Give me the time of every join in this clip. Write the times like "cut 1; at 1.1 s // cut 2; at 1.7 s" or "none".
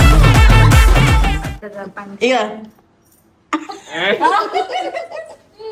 none